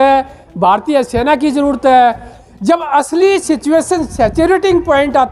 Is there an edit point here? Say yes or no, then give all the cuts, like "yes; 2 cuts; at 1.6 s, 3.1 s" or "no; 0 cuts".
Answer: yes; 1 cut; at 2.3 s